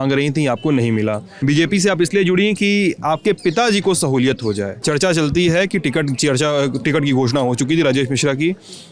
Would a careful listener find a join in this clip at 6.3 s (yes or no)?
no